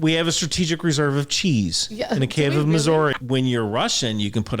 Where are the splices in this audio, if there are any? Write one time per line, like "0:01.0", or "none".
0:03.1